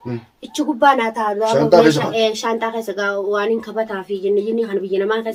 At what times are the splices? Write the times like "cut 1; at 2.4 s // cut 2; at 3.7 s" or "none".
none